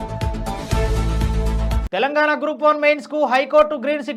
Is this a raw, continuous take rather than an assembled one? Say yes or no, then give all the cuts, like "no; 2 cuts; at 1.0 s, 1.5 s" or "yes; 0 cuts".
yes; 0 cuts